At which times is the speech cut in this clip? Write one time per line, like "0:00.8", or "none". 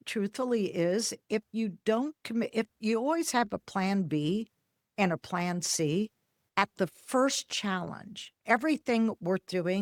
none

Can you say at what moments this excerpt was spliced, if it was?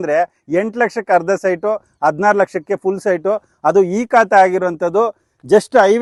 none

